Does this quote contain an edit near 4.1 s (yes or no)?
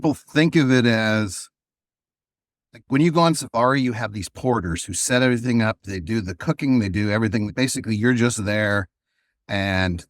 no